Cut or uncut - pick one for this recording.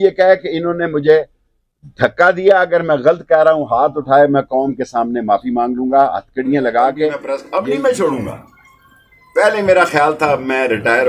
cut